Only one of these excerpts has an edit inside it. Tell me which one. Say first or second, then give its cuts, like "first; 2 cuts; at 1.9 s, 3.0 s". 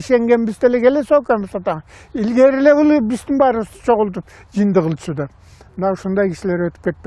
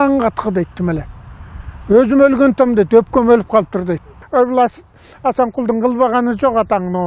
second; 1 cut; at 4.2 s